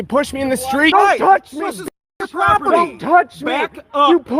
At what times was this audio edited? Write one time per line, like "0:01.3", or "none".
0:00.9